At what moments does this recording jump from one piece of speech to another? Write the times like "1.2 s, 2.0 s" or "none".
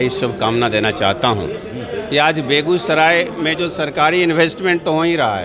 none